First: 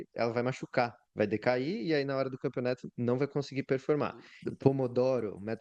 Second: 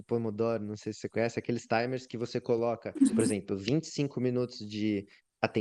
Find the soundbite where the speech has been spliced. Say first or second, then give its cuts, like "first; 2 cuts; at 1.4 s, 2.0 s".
first; 1 cut; at 4.4 s